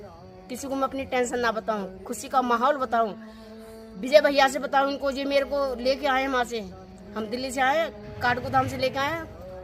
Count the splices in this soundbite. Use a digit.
0